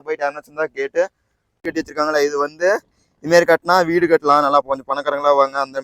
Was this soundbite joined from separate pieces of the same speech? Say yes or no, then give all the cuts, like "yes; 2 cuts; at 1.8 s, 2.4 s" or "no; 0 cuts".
yes; 1 cut; at 1.6 s